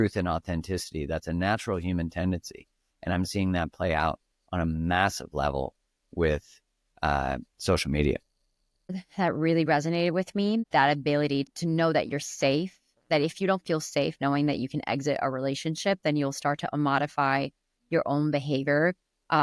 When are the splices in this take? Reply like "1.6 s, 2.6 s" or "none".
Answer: 9.0 s, 10.7 s, 11.5 s